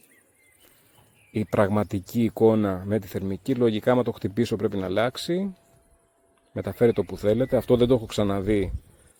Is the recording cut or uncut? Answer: uncut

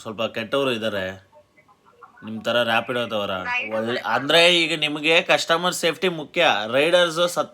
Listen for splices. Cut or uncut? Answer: cut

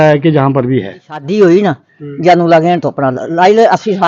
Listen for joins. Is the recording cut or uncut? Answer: cut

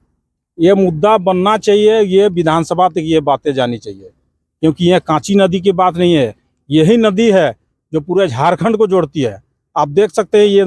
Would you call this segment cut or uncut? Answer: uncut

